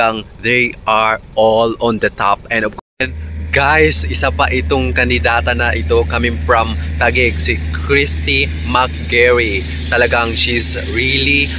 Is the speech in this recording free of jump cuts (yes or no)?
no